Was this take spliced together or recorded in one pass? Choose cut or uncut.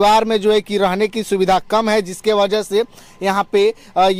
uncut